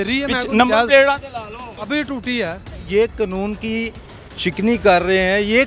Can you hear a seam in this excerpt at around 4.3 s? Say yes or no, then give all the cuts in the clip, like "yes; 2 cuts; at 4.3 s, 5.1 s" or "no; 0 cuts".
no; 2 cuts; at 1.7 s, 2.8 s